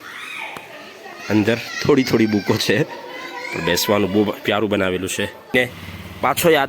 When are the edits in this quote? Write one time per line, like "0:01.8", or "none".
0:05.5